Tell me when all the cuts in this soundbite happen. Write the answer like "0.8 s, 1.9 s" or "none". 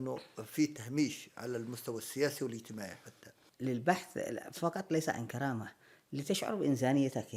3.4 s